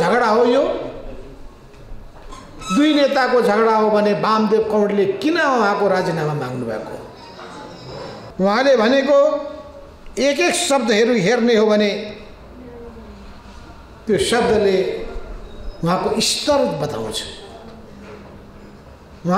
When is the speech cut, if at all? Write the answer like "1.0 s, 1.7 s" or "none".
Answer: 8.3 s

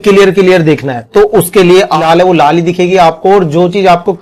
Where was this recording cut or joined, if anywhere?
2.0 s

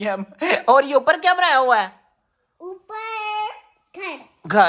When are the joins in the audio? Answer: none

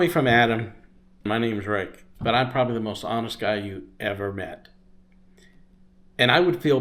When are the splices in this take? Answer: 1.3 s

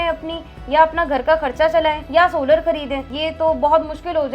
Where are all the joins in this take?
2.0 s, 3.1 s

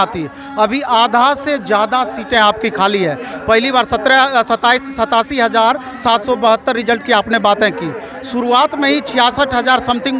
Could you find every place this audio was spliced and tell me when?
none

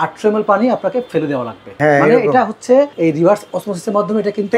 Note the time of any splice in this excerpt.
1.8 s, 2.9 s

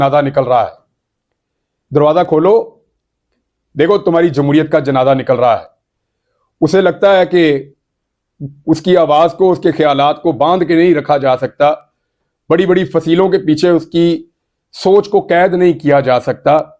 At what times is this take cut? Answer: none

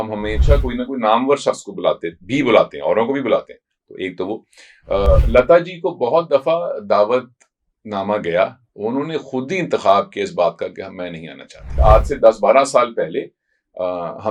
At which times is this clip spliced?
11.7 s

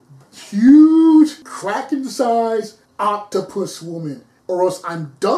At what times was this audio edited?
1.5 s, 2.8 s, 4.3 s

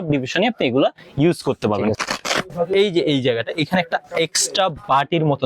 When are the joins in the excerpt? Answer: 1.9 s

